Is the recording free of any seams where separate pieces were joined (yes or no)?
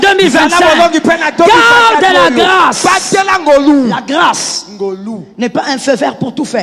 no